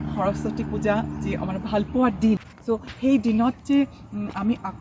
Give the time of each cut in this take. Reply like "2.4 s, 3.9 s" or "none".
2.5 s